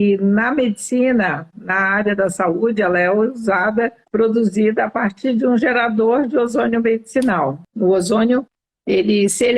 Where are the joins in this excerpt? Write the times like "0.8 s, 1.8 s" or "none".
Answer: 4.0 s, 7.6 s

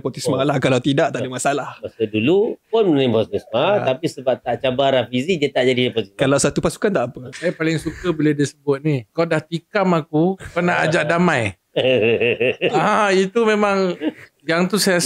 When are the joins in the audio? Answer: 7.3 s, 9.1 s

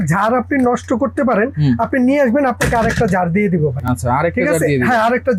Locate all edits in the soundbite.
none

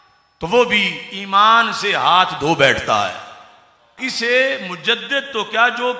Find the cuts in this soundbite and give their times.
3.9 s

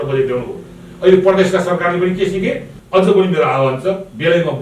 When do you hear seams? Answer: 2.7 s

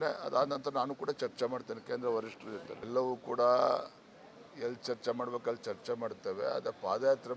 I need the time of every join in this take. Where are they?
2.9 s

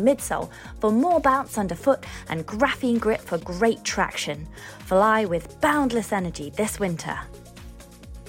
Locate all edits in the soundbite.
7.2 s

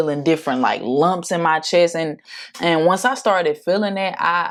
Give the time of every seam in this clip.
none

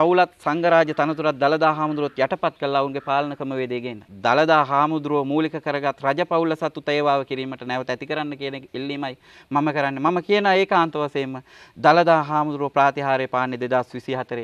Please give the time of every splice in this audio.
3.8 s

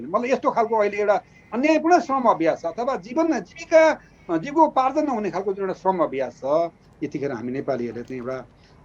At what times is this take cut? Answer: 6.9 s

